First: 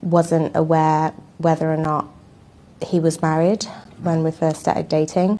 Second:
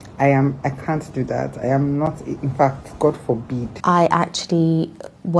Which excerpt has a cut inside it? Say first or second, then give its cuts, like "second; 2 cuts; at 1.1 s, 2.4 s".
second; 1 cut; at 3.7 s